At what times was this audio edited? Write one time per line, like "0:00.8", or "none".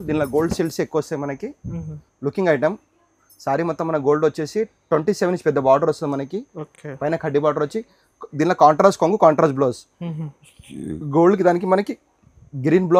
none

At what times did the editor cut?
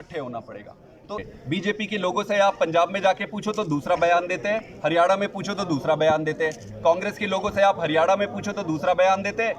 0:01.3

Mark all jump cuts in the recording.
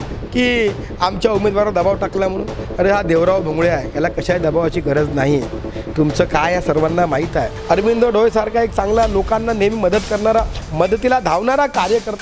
0:07.5

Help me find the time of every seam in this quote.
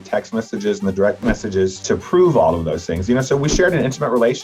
none

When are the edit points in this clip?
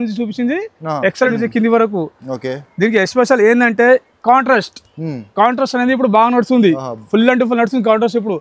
0:01.3

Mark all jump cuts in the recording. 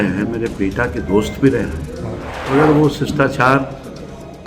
0:02.3

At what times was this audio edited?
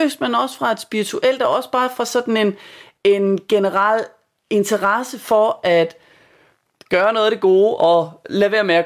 none

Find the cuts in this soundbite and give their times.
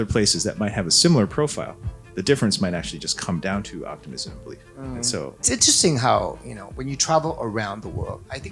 0:05.4

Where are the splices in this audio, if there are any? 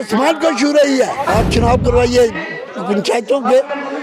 0:01.3

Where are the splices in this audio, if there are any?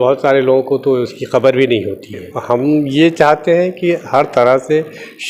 0:02.3

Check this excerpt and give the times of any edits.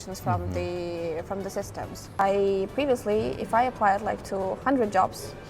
0:02.2

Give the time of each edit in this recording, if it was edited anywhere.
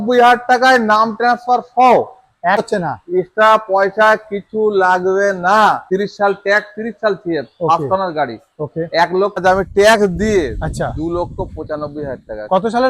0:02.6
0:05.8
0:09.4

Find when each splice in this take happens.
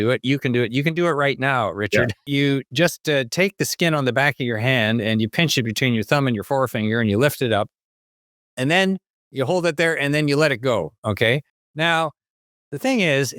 0:02.2

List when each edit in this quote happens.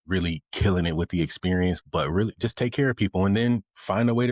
0:01.8

